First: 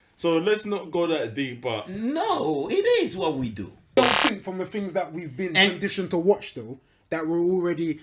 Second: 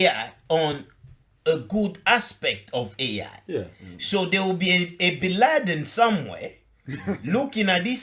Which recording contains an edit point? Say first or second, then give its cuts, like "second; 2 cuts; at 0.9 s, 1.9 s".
first; 1 cut; at 4.0 s